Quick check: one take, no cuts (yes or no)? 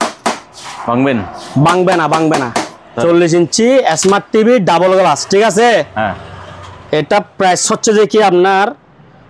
yes